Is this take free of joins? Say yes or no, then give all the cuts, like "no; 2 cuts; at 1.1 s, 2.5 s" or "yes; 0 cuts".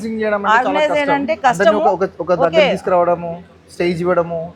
yes; 0 cuts